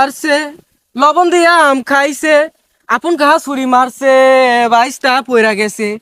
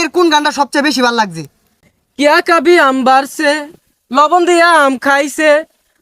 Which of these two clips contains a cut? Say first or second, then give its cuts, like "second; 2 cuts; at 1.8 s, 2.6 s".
second; 1 cut; at 1.7 s